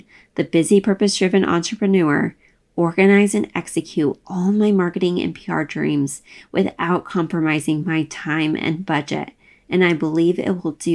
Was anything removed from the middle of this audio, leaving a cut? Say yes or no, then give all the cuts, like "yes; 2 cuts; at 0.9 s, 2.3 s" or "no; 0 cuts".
no; 0 cuts